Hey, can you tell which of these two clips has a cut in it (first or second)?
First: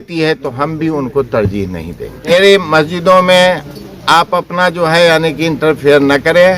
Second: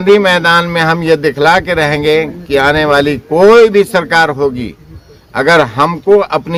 first